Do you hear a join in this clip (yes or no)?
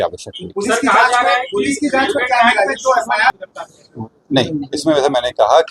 no